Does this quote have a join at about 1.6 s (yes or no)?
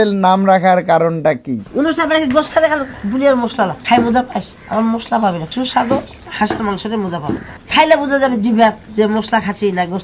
yes